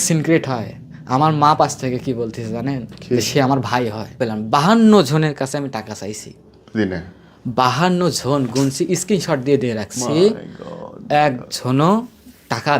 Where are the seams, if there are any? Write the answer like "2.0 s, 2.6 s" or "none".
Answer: 4.2 s